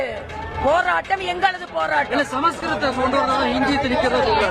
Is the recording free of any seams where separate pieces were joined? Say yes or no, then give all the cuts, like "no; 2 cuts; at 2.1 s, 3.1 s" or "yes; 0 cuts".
yes; 0 cuts